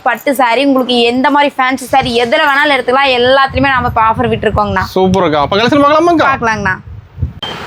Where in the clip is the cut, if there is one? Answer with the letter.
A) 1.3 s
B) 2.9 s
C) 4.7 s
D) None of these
D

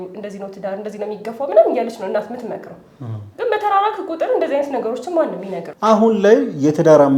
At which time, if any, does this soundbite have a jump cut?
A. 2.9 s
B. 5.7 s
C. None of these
B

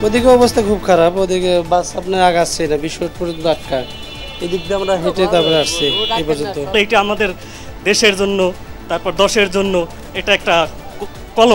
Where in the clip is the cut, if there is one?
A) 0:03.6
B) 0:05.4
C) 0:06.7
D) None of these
C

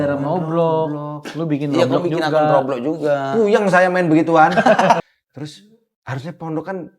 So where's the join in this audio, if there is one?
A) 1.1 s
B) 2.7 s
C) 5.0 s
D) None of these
C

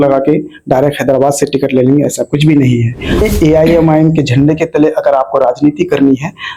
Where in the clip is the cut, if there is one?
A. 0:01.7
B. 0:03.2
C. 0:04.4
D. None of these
B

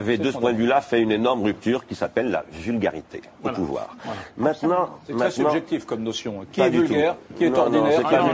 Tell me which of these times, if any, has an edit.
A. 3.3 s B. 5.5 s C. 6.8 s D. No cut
C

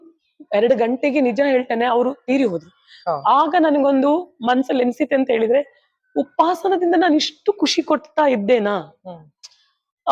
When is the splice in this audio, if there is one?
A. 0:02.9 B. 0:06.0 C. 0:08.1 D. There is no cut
D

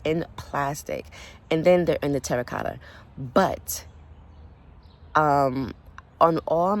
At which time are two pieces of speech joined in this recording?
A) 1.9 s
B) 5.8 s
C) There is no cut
C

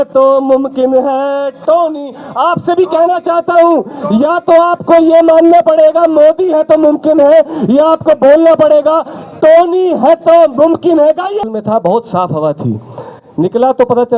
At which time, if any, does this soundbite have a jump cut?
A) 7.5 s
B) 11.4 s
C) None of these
B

